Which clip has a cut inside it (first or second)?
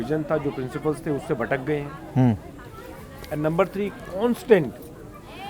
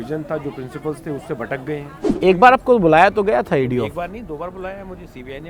second